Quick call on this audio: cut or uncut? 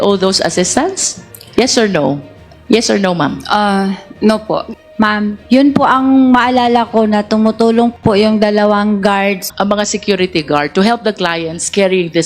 cut